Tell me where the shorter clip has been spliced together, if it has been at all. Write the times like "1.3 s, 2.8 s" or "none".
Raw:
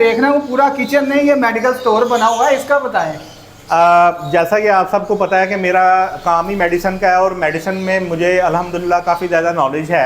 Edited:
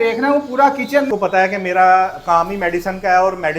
1.1 s